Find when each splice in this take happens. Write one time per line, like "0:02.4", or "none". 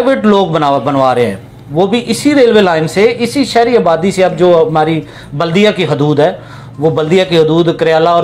none

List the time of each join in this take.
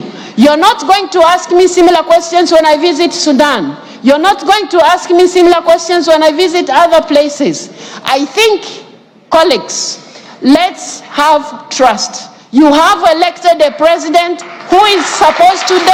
none

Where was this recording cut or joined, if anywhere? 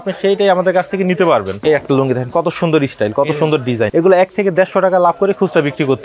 0:01.5
0:03.9

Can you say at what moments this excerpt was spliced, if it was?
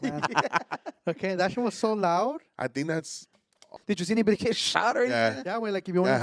0:03.8

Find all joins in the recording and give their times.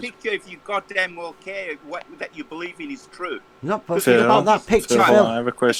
none

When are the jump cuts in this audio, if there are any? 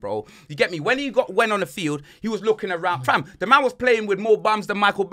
none

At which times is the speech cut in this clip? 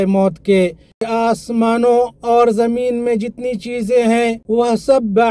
0:01.1
0:04.4

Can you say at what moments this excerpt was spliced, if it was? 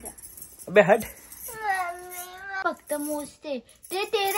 0:02.6

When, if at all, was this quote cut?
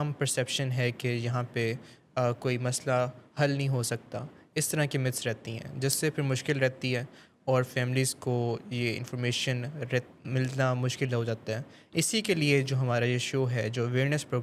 none

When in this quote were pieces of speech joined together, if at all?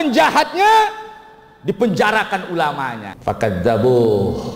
0:03.1

